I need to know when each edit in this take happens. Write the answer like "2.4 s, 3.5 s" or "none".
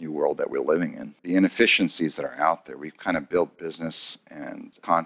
1.1 s

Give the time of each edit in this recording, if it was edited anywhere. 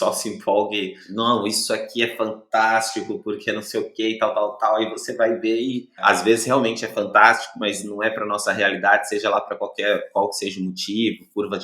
1.0 s, 6.0 s

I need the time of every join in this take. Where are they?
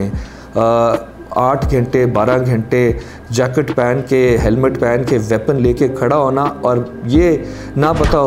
none

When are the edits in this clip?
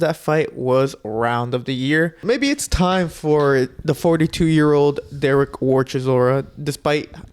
2.2 s

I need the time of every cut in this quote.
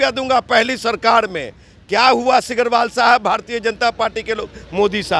none

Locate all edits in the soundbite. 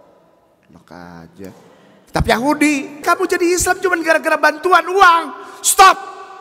3.0 s

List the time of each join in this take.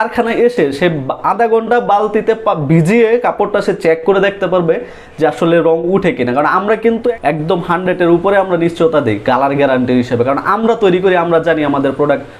7.2 s

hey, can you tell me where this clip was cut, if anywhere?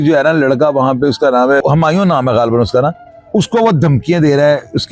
none

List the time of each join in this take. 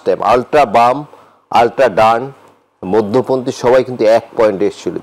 none

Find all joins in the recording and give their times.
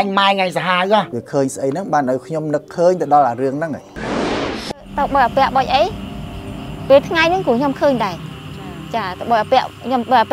1.2 s

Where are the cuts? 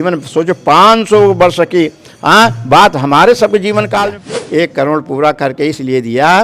3.9 s

